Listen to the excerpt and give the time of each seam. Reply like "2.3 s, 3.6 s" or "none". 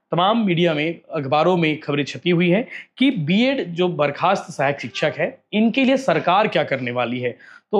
none

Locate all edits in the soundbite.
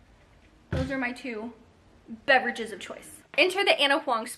3.2 s

